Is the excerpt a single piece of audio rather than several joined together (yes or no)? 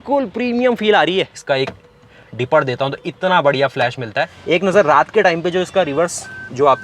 no